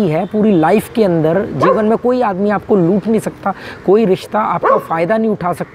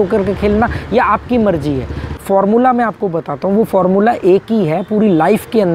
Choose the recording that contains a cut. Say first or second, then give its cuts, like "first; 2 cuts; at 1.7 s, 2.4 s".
second; 1 cut; at 2.2 s